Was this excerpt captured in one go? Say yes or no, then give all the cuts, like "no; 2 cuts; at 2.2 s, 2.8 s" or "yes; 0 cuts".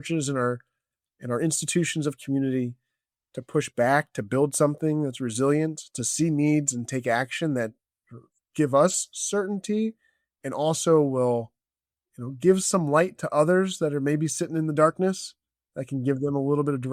yes; 0 cuts